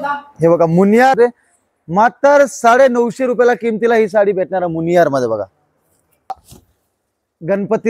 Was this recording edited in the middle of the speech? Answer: yes; 2 cuts; at 1.1 s, 6.3 s

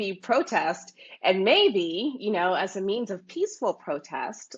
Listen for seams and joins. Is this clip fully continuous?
yes; 0 cuts

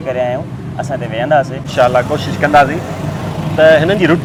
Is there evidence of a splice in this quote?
no; 0 cuts

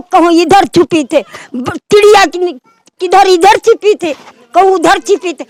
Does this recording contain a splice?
no; 0 cuts

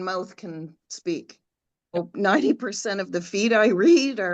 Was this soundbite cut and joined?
yes; 1 cut; at 1.9 s

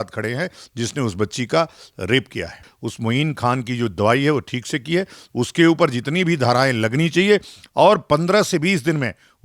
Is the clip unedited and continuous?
no; 1 cut; at 2.6 s

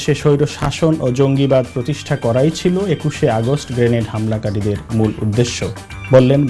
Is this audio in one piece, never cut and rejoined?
yes; 0 cuts

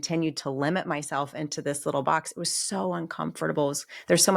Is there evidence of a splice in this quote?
no; 0 cuts

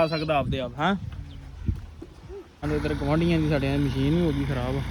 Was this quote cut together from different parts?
yes; 1 cut; at 2.6 s

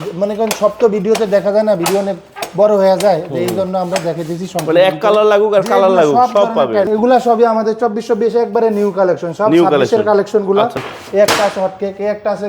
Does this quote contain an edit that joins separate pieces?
yes; 2 cuts; at 6.9 s, 10.8 s

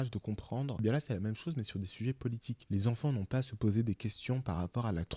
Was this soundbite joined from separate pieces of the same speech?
yes; 2 cuts; at 0.8 s, 2.5 s

